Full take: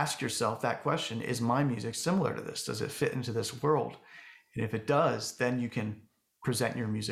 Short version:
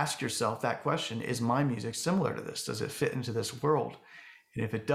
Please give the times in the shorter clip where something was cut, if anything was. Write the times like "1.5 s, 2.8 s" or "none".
none